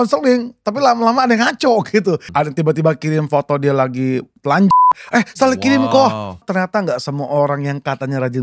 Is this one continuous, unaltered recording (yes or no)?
no